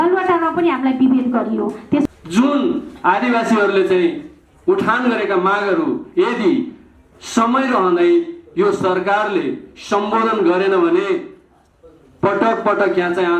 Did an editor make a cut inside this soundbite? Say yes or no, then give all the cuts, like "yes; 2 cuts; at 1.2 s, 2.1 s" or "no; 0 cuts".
yes; 1 cut; at 2.1 s